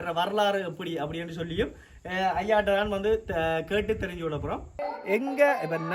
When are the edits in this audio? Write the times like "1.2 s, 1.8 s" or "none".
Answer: 4.8 s